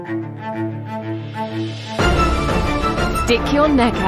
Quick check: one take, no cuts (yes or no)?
yes